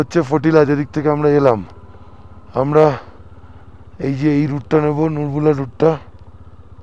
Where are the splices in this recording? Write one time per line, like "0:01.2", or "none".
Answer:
none

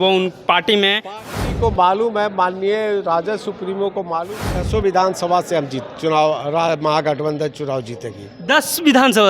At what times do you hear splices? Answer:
0:01.3
0:04.5

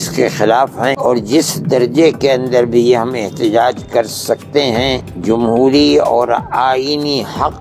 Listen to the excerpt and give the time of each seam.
0:01.0
0:05.1

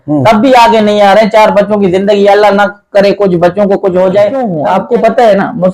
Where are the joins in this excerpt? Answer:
0:04.5

